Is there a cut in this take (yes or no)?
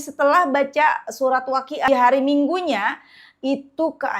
yes